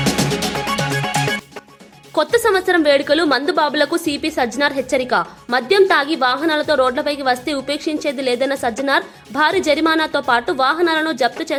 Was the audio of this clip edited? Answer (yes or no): no